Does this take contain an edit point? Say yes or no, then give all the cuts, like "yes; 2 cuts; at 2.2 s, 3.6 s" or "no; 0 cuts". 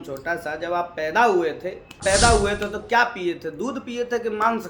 yes; 1 cut; at 2.0 s